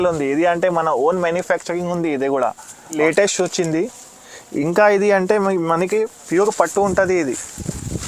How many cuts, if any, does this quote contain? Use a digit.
1